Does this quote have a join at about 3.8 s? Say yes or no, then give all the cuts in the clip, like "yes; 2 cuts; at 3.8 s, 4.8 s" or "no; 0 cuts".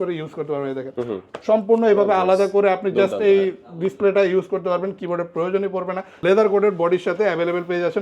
no; 1 cut; at 6.1 s